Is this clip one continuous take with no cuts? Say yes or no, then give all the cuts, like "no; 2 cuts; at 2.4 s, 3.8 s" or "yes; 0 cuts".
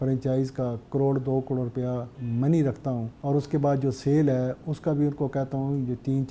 no; 2 cuts; at 2.1 s, 3.1 s